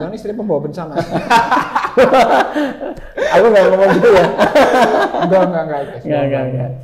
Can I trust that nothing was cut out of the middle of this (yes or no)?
yes